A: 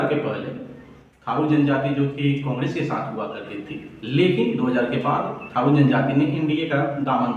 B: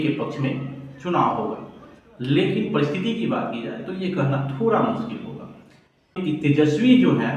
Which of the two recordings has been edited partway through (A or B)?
B